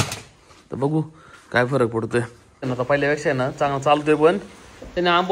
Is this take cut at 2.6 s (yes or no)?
yes